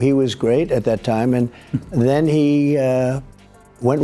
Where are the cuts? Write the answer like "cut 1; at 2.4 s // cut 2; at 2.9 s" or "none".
none